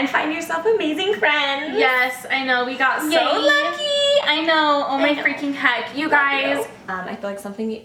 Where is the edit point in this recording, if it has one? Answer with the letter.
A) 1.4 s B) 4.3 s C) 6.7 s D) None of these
D